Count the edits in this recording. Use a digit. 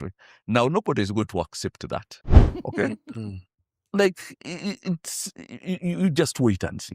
1